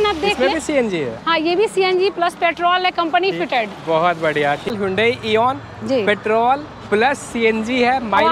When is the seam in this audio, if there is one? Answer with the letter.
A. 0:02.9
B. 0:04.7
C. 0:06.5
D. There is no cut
B